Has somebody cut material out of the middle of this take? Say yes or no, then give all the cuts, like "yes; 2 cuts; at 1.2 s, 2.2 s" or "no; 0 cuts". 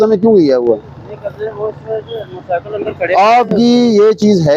no; 0 cuts